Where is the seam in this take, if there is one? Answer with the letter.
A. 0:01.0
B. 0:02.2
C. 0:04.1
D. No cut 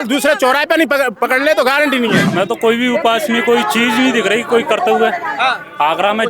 B